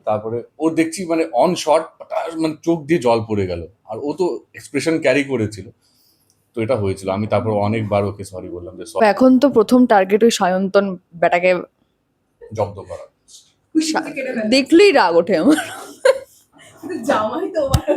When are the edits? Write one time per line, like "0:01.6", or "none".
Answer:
0:09.0